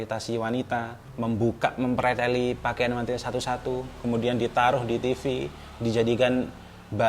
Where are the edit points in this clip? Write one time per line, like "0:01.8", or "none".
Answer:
0:01.0